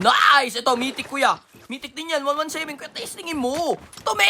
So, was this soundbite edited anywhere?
no; 0 cuts

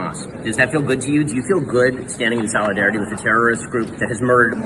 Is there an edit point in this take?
yes; 1 cut; at 1.7 s

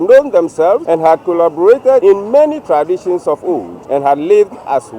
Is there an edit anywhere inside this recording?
yes; 3 cuts; at 0.8 s, 2.0 s, 3.7 s

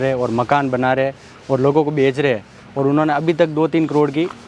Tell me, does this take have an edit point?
no; 0 cuts

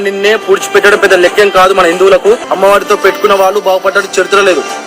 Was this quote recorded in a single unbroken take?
no; 1 cut; at 2.5 s

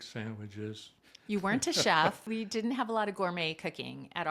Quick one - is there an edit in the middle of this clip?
yes; 1 cut; at 2.2 s

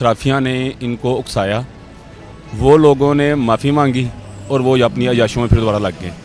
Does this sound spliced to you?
no; 0 cuts

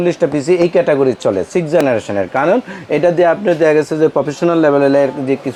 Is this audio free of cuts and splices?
yes; 0 cuts

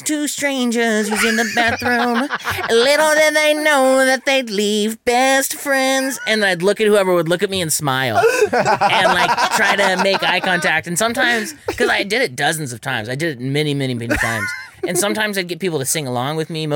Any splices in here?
no; 0 cuts

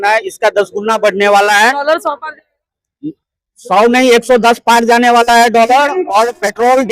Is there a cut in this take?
no; 0 cuts

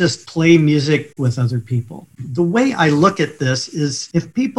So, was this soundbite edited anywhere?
yes; 1 cut; at 1.1 s

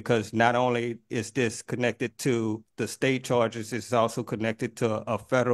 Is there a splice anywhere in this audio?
no; 0 cuts

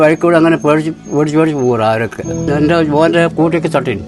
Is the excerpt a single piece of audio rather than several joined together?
no; 1 cut; at 2.4 s

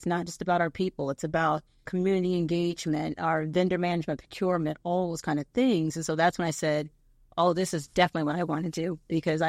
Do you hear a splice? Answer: yes; 1 cut; at 1.9 s

